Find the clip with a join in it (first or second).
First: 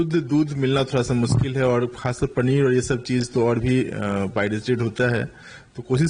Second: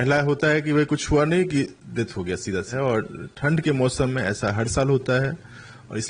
second